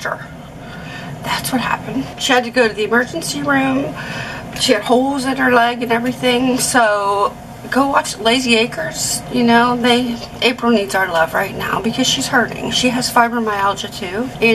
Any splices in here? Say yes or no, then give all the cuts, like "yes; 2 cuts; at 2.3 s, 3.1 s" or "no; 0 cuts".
no; 0 cuts